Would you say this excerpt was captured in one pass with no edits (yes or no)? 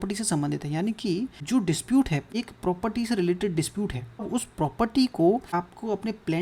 no